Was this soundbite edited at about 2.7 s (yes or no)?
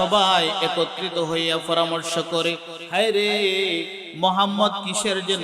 yes